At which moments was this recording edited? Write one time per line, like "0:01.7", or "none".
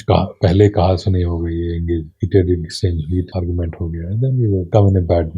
0:02.1
0:03.3
0:04.7